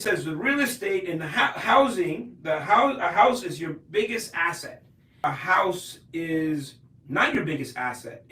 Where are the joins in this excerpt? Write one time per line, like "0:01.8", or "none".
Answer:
0:05.1